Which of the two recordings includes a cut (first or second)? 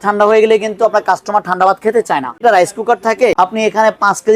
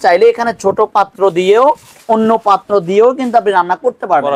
first